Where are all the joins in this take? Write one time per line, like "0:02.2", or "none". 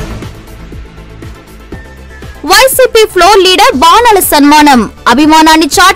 0:02.3